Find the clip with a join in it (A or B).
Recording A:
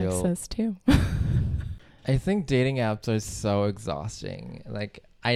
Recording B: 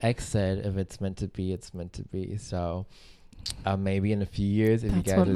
A